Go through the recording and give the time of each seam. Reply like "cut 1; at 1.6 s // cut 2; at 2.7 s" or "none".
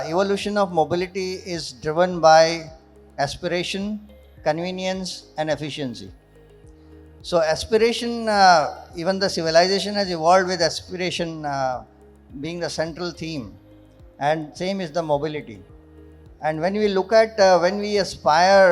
none